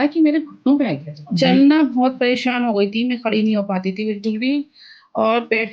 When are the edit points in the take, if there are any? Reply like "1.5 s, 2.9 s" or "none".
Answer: 1.3 s